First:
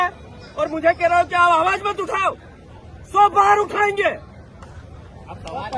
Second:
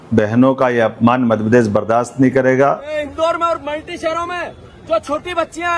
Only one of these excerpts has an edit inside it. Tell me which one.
second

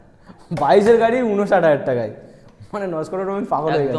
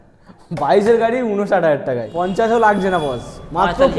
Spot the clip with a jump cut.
second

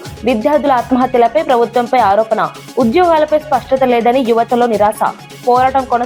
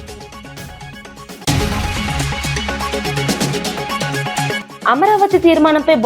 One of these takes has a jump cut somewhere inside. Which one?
second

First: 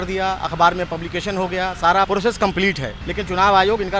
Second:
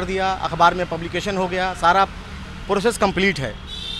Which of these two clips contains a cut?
first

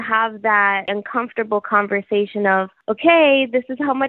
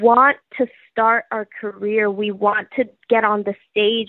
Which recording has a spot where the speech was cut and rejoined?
first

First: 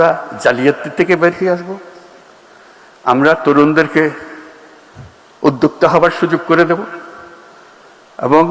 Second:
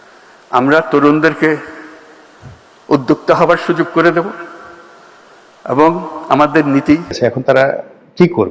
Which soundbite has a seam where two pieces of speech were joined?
second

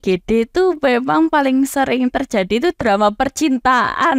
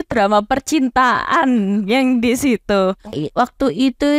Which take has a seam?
second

